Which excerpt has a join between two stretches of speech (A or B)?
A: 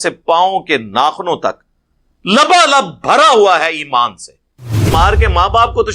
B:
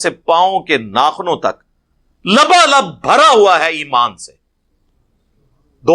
A